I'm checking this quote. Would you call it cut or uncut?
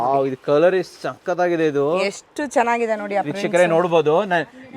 uncut